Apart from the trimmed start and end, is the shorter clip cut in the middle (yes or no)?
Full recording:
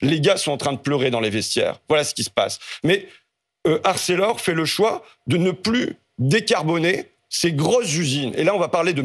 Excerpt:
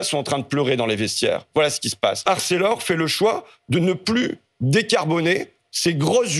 yes